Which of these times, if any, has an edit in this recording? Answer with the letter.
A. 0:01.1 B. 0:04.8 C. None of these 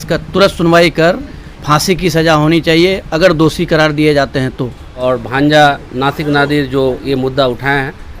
B